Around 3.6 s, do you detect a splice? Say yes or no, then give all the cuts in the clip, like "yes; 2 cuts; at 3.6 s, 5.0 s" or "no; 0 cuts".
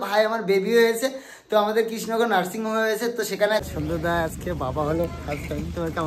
yes; 1 cut; at 3.6 s